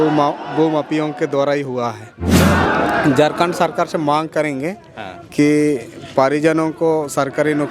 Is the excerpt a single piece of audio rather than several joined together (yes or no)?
no